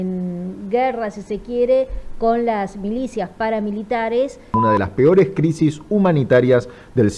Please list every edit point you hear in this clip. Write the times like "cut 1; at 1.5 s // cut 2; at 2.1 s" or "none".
cut 1; at 4.6 s